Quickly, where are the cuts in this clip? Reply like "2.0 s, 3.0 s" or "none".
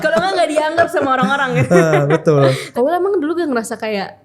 2.6 s